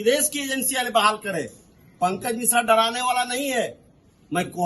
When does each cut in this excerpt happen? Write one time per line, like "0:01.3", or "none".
none